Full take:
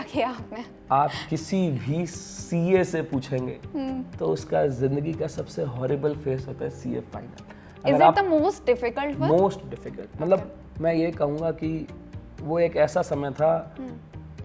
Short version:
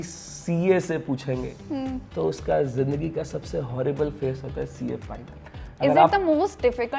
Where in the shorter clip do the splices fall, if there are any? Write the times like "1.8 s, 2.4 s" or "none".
none